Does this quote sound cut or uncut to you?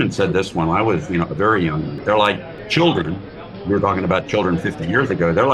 cut